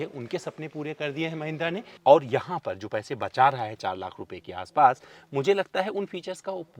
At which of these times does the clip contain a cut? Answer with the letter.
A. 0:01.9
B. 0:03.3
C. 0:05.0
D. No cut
A